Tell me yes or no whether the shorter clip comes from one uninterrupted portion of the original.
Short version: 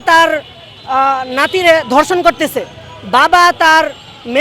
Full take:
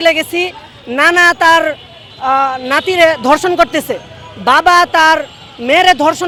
yes